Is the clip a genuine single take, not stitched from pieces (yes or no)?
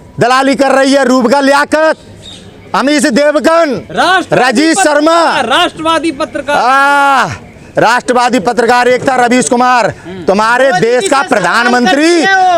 yes